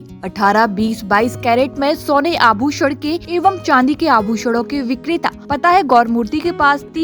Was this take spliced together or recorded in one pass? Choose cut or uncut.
cut